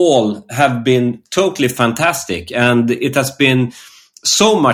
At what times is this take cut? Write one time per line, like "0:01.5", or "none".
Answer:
none

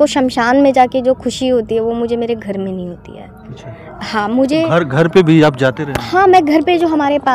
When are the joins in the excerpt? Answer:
none

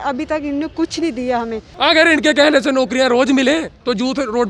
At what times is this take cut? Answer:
0:01.7

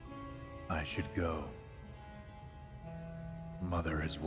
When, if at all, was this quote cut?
none

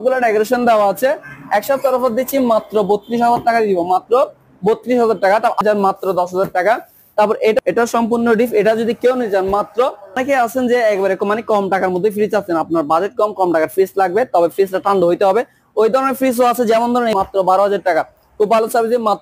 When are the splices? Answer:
0:05.6
0:07.6
0:10.2
0:17.1

